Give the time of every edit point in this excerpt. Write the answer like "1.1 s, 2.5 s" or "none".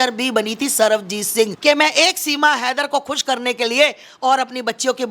1.6 s